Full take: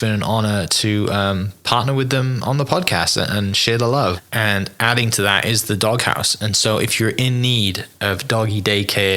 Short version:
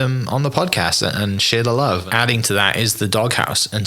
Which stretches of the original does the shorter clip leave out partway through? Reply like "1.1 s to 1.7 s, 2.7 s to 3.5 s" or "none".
4.2 s to 4.7 s